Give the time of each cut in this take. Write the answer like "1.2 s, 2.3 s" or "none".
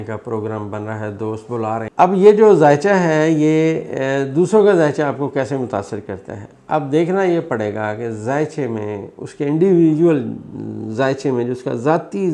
1.9 s